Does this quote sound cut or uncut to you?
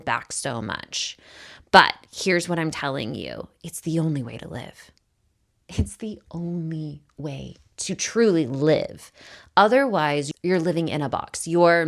uncut